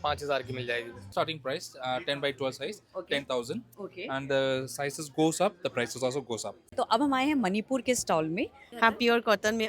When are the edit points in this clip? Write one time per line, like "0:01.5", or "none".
0:01.0
0:06.7
0:08.6